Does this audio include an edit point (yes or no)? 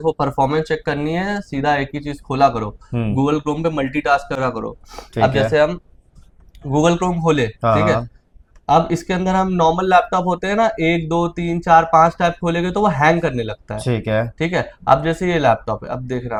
no